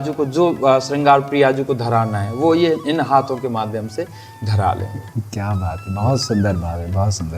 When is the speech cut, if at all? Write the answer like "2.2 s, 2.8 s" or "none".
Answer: none